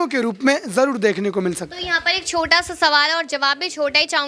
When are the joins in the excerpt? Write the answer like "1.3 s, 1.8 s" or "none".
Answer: none